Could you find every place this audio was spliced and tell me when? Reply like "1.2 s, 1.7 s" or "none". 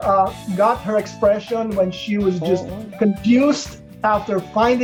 none